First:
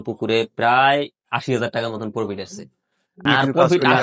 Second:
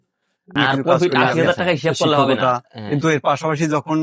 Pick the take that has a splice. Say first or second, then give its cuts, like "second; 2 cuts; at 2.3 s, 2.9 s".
second; 1 cut; at 2.3 s